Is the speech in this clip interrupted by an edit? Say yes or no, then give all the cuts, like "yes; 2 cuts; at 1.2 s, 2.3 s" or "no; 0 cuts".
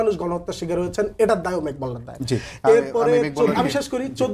no; 0 cuts